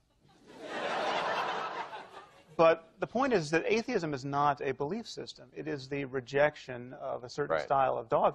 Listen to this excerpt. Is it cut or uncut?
uncut